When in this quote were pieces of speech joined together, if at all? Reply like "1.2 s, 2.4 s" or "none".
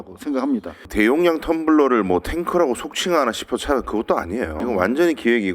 0.9 s, 4.6 s